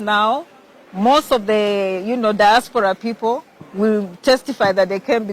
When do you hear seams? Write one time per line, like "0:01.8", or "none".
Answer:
none